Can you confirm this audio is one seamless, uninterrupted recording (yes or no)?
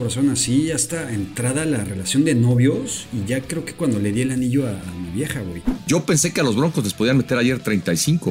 no